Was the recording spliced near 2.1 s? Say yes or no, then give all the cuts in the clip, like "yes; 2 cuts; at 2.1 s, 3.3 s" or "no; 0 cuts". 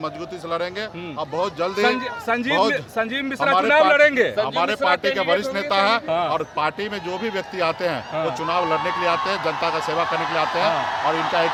no; 0 cuts